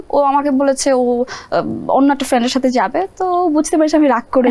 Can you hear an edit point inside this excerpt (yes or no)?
no